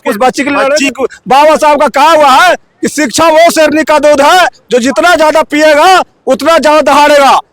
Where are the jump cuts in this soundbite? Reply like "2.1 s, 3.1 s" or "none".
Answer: 0.9 s